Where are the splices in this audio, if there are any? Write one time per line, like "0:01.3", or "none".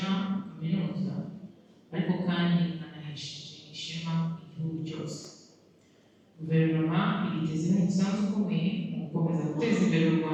none